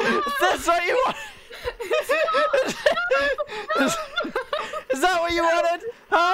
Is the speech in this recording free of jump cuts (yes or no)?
yes